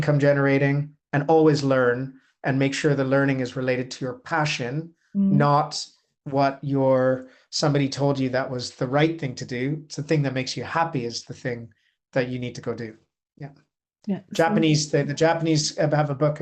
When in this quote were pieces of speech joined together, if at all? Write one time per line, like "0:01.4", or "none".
none